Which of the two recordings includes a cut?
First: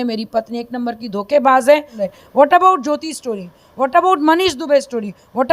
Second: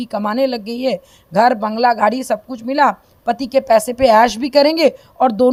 first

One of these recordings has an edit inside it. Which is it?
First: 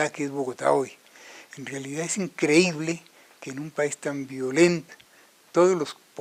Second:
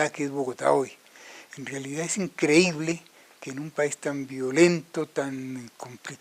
second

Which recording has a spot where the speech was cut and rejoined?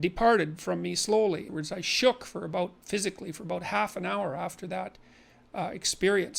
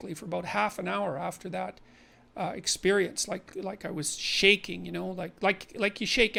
first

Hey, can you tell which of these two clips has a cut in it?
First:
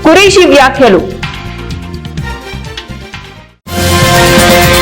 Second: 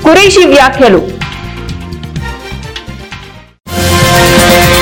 first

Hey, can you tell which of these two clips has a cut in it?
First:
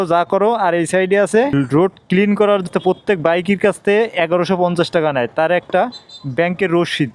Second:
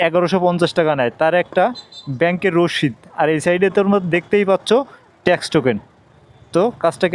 first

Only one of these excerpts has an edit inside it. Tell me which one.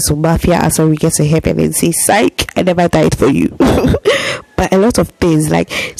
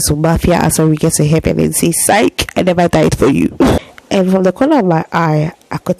second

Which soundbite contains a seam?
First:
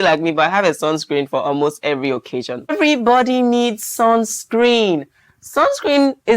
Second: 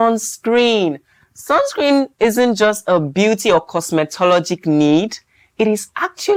first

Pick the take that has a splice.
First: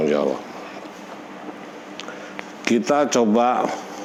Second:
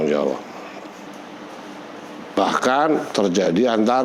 second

